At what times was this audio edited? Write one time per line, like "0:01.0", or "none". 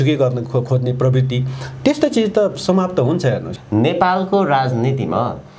0:03.5